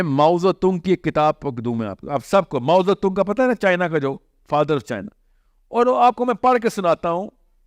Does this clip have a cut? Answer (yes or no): no